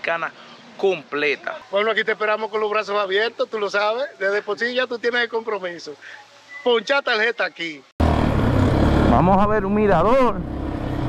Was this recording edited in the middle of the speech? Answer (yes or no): yes